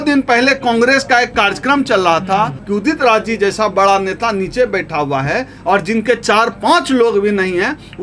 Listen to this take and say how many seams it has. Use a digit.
1